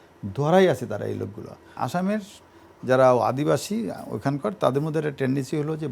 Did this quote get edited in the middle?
yes; 1 cut; at 1.8 s

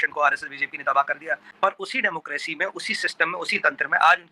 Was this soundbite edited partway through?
yes; 1 cut; at 1.5 s

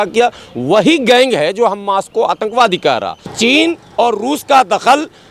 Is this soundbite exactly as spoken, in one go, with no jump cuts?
no; 1 cut; at 3.3 s

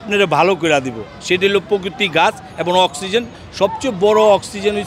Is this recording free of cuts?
yes; 0 cuts

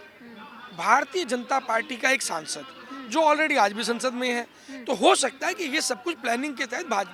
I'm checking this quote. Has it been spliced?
no; 0 cuts

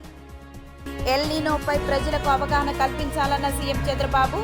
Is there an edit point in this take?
yes; 1 cut; at 0.9 s

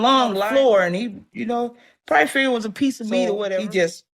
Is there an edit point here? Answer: no; 0 cuts

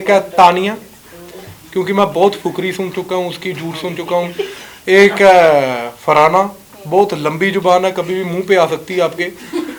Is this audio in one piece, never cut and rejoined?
yes; 0 cuts

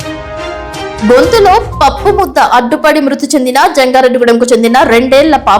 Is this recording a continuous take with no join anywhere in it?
no; 1 cut; at 1.0 s

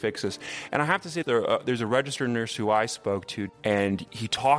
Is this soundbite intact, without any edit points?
no; 1 cut; at 3.4 s

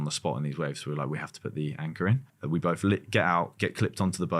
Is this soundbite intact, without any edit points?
no; 1 cut; at 2.3 s

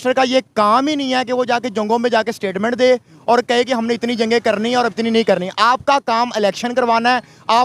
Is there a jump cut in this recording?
no; 0 cuts

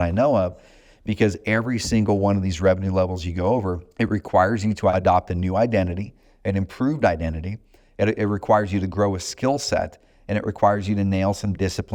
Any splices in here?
yes; 2 cuts; at 3.8 s, 4.9 s

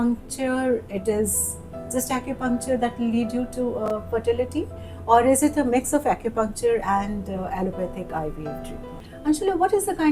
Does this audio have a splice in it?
yes; 1 cut; at 8.9 s

